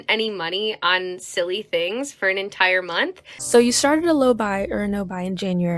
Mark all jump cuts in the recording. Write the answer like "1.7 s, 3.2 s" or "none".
3.3 s

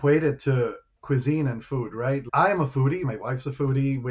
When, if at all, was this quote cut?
3.0 s

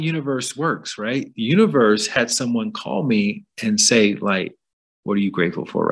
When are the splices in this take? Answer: 1.3 s

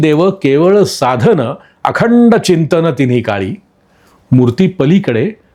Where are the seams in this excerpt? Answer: none

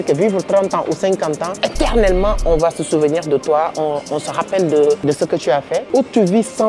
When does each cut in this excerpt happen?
1.5 s, 5.0 s, 5.8 s

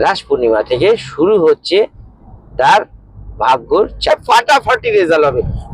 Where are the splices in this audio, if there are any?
4.1 s

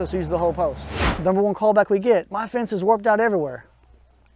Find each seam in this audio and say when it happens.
0.9 s

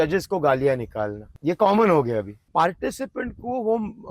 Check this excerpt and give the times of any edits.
1.2 s, 2.4 s

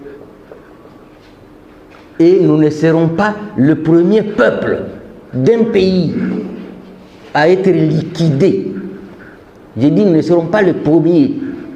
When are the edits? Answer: none

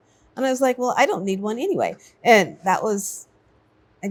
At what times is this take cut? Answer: none

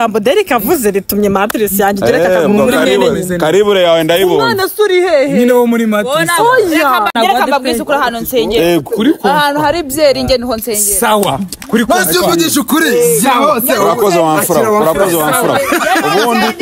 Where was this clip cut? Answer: 7.1 s

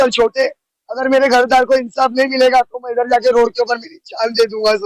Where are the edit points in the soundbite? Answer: none

